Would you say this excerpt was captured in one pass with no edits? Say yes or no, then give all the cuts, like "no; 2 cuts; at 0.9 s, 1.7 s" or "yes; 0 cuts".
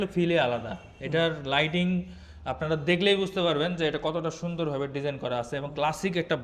yes; 0 cuts